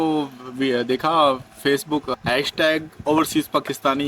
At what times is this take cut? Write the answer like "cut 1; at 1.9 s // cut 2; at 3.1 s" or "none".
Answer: cut 1; at 2.1 s

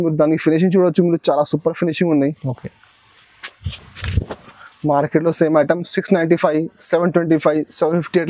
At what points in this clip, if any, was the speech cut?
none

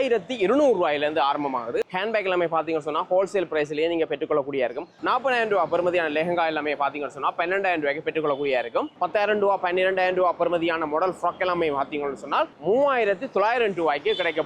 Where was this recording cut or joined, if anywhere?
cut 1; at 1.7 s // cut 2; at 4.9 s // cut 3; at 8.9 s

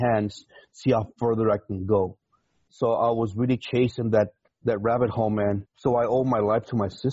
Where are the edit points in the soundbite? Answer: cut 1; at 4.5 s // cut 2; at 5.7 s

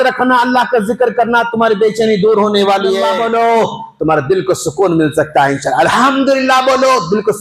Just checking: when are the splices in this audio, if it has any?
cut 1; at 3.2 s

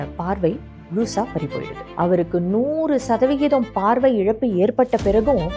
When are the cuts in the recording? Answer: cut 1; at 1.7 s

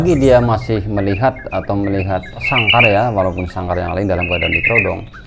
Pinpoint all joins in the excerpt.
cut 1; at 2.4 s

